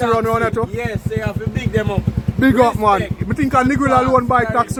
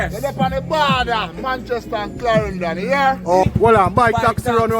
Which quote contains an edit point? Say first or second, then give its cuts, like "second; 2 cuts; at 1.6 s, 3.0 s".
second; 1 cut; at 3.4 s